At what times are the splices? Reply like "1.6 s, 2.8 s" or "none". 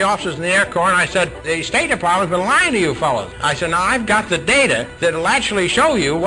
1.4 s, 3.4 s, 4.9 s